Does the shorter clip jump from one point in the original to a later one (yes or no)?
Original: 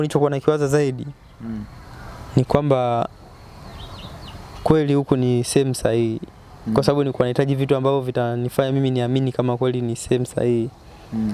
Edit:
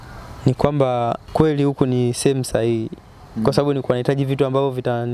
yes